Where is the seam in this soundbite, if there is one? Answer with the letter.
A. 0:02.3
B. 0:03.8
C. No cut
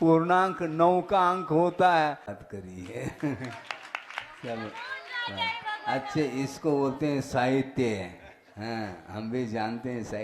A